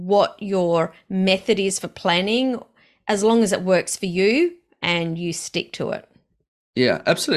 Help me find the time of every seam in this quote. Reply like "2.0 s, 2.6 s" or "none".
none

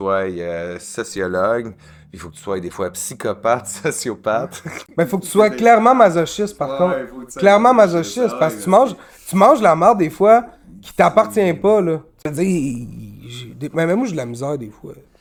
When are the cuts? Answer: none

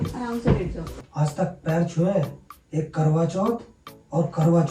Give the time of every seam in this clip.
1.0 s

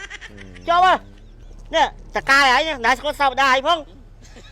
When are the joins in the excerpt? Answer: 1.5 s

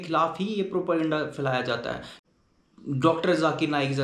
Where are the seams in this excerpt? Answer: 2.5 s

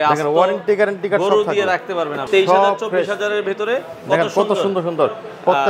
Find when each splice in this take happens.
2.2 s

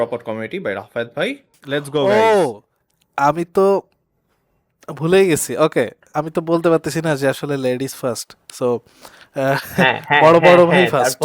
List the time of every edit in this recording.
1.5 s, 6.0 s

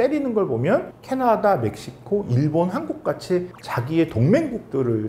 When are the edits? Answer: none

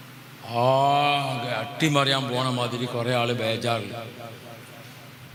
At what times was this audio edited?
none

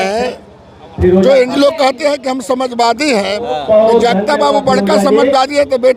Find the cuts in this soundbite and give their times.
1.5 s

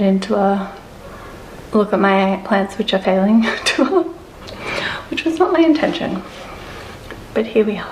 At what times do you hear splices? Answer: none

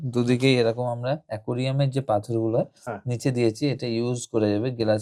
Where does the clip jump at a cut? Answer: none

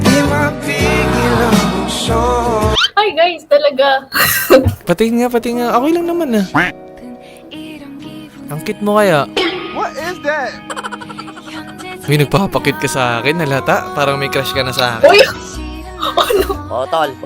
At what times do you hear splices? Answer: none

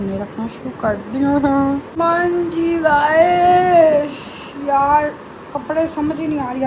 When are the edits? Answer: 1.9 s

